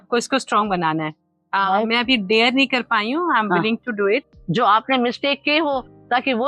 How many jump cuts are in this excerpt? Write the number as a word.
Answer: one